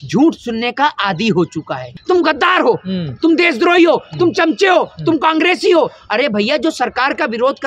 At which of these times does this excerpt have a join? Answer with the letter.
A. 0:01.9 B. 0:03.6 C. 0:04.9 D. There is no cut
A